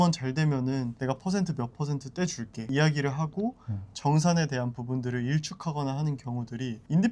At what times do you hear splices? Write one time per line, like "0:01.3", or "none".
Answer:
0:00.9
0:02.7